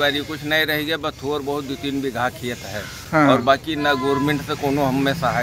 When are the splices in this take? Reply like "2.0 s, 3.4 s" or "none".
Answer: none